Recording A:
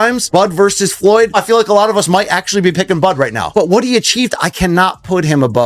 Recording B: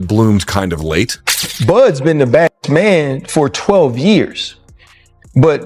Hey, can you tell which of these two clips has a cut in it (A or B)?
B